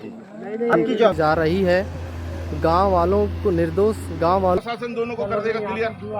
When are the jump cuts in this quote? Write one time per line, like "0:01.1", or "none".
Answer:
0:01.2
0:04.6